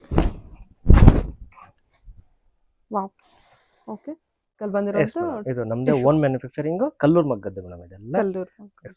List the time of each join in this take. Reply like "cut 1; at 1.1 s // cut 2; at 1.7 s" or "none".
cut 1; at 4.6 s